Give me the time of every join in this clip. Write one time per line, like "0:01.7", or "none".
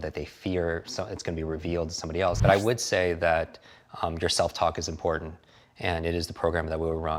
0:02.4